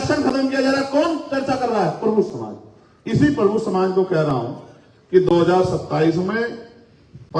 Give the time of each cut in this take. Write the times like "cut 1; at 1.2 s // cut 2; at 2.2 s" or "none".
none